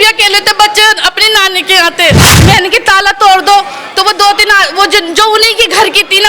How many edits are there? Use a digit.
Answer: 1